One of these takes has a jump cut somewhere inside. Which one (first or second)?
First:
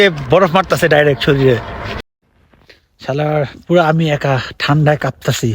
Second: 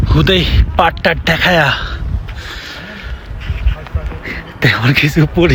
first